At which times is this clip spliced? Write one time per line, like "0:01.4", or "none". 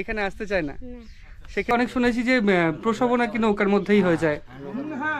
0:01.7